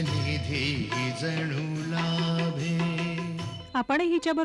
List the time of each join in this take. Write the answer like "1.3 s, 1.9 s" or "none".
3.5 s